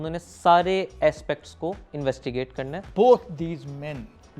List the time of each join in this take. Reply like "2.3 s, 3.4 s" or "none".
2.8 s